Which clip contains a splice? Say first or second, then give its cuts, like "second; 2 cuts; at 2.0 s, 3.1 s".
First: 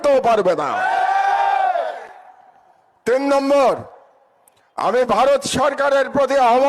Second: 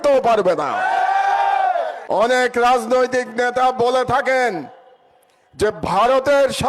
second; 1 cut; at 2.0 s